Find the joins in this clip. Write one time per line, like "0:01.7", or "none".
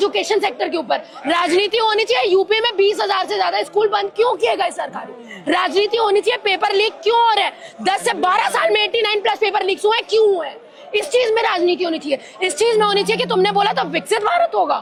none